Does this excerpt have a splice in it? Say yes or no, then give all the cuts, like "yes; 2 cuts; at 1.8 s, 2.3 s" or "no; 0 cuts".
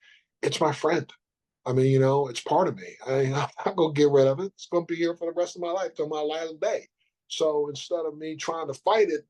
no; 0 cuts